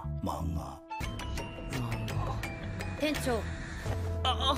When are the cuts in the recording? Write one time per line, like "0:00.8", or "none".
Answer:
0:02.5